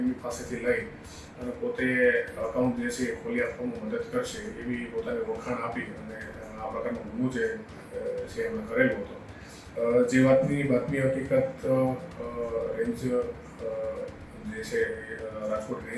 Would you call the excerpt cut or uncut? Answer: uncut